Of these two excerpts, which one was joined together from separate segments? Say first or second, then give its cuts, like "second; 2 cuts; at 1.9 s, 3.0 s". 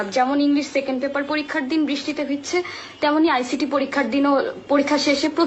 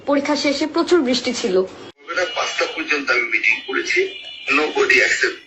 second; 1 cut; at 2.1 s